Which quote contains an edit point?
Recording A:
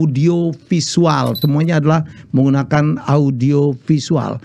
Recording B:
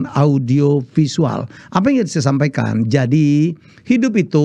A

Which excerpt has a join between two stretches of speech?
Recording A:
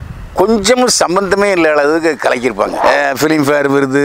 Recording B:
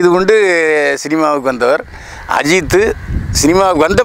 A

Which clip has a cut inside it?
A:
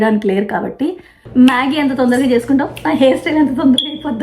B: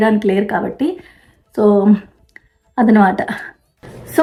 A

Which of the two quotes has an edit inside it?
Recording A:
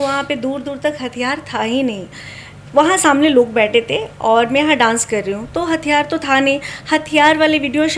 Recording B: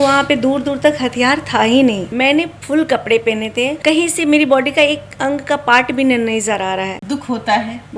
B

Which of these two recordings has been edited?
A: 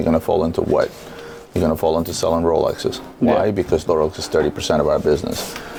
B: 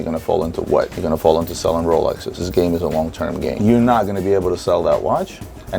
B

